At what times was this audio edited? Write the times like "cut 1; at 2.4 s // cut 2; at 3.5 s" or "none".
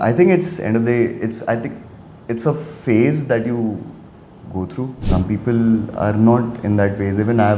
cut 1; at 5.0 s